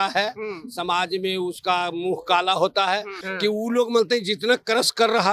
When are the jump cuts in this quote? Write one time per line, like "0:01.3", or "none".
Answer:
0:03.2